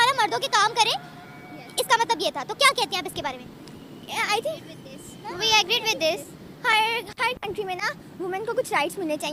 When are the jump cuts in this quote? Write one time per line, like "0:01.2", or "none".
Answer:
none